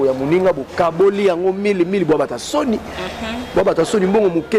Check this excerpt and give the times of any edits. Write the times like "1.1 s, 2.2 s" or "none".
none